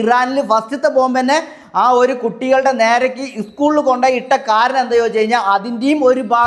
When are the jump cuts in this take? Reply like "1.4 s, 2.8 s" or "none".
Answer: none